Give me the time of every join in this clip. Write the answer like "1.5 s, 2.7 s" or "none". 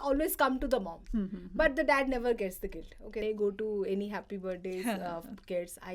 3.2 s

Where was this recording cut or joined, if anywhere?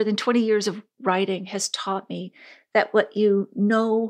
none

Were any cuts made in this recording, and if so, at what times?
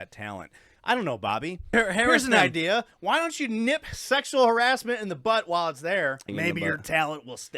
1.7 s, 6.2 s

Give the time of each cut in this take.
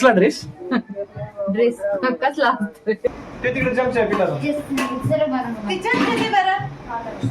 3.1 s

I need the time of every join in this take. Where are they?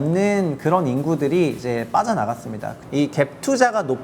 2.8 s

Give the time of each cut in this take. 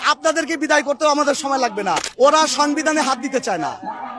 2.1 s

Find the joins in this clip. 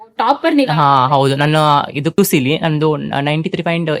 2.2 s

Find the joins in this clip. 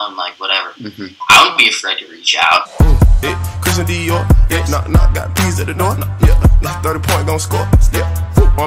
1.1 s, 2.7 s

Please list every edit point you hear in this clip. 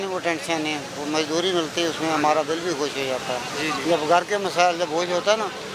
none

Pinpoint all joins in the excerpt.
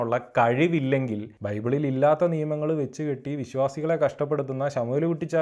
1.4 s

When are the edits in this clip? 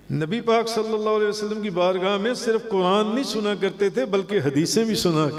none

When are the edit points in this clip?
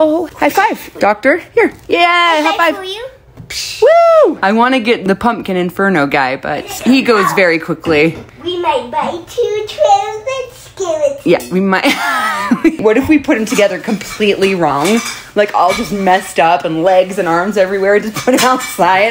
4.9 s, 6.8 s, 8.2 s, 12.8 s

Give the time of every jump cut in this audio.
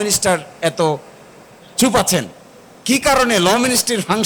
none

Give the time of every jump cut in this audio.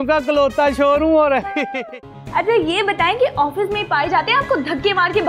1.7 s

